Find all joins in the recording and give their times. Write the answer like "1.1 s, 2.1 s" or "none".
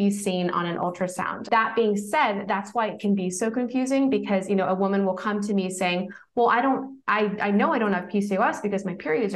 1.4 s